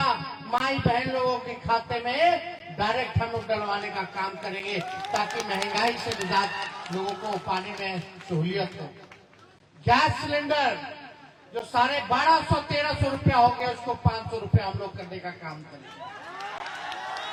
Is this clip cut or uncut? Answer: uncut